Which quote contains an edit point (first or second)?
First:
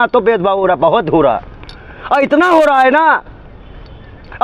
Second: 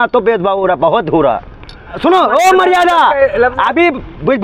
second